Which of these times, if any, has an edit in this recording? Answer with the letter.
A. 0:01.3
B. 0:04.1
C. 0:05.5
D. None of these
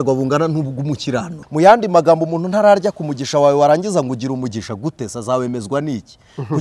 A